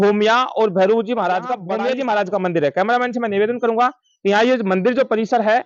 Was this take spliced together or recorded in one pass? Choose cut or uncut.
cut